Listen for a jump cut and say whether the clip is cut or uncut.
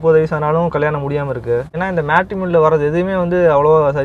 cut